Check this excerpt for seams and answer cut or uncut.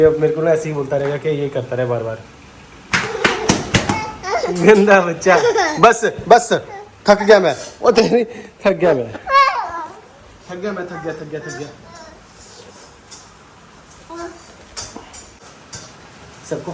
uncut